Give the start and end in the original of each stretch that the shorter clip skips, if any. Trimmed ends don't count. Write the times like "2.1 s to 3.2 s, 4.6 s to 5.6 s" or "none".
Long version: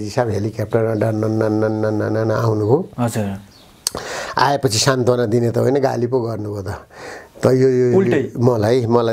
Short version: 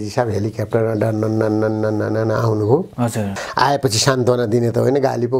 3.4 s to 4.2 s